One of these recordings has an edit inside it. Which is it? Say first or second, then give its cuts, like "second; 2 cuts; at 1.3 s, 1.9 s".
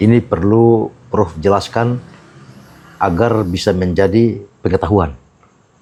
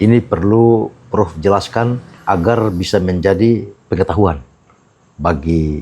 second; 1 cut; at 2.1 s